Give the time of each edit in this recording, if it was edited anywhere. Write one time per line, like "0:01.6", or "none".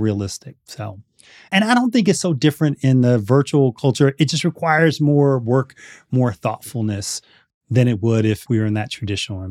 0:01.5
0:08.4

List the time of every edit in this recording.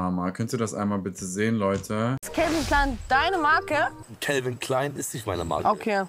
0:02.2
0:04.1

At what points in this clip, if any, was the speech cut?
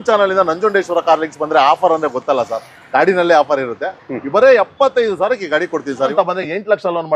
0:06.1

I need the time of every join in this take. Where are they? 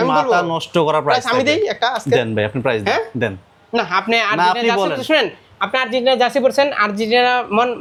none

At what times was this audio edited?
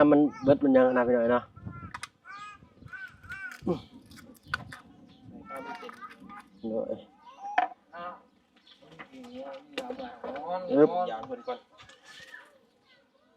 none

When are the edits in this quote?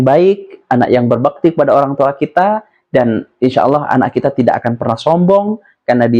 none

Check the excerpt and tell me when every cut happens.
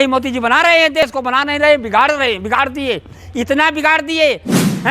0:01.1

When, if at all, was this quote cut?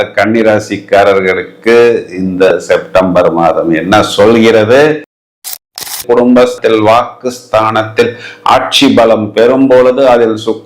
0:05.4

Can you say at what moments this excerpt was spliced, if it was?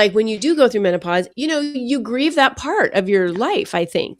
0:01.3

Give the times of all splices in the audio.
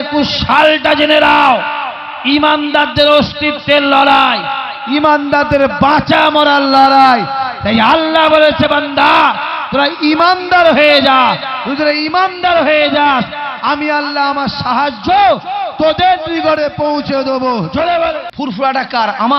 0:18.3

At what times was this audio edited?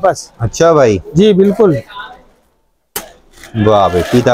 none

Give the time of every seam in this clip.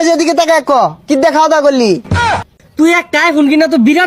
0:02.2

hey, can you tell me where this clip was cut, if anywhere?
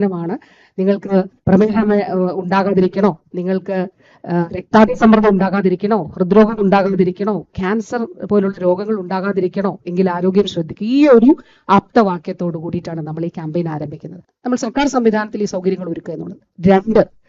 0:14.3

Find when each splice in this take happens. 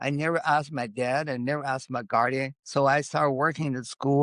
0:02.6

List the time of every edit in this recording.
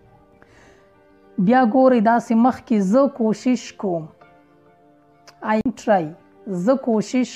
0:05.6

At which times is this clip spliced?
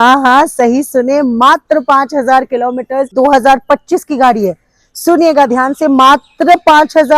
0:03.1

